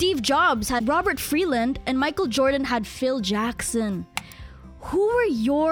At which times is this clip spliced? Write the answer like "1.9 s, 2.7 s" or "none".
none